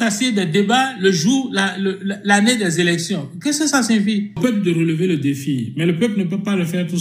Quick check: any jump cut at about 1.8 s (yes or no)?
no